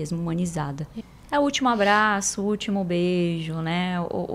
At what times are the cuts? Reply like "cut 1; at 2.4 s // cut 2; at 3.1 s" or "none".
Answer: cut 1; at 0.9 s